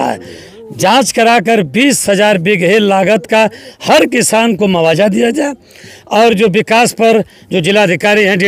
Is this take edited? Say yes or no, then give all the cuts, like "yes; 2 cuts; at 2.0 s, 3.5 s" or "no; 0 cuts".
no; 0 cuts